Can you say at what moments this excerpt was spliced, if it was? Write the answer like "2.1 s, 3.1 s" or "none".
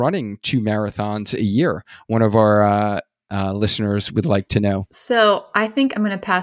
4.9 s